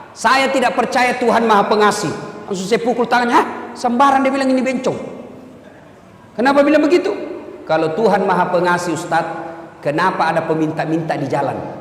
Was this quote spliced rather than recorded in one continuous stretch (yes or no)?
no